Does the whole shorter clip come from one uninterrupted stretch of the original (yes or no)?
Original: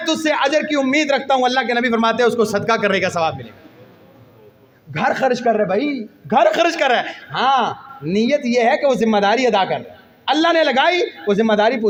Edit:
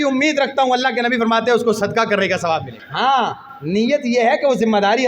no